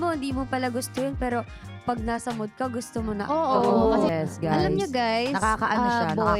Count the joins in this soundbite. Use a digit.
1